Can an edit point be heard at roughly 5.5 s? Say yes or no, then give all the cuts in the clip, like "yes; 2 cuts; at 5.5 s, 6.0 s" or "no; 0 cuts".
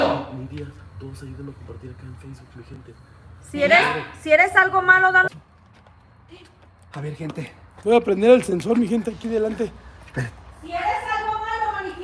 yes; 1 cut; at 5.5 s